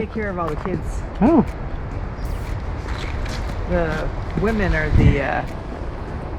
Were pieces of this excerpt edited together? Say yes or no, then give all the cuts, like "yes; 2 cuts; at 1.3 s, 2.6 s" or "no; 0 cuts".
no; 0 cuts